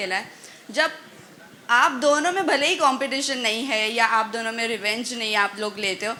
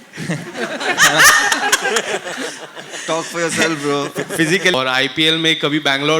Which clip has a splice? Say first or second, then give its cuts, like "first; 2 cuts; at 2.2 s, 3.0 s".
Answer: second; 1 cut; at 4.7 s